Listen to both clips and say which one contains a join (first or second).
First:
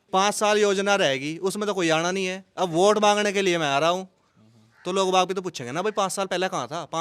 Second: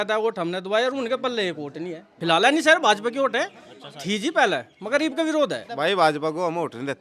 second